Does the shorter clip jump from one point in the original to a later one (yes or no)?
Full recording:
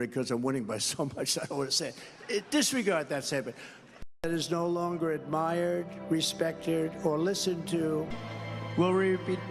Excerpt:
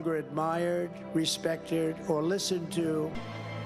no